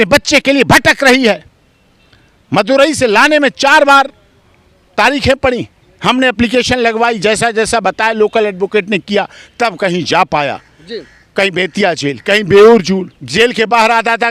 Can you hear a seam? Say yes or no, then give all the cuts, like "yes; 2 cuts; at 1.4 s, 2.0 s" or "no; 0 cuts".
no; 0 cuts